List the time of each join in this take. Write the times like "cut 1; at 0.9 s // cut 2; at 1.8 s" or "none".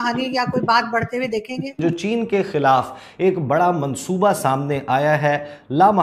cut 1; at 1.8 s